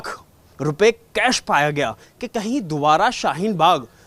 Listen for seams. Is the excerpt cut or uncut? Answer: cut